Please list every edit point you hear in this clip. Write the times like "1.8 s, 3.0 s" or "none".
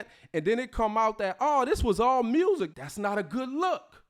2.8 s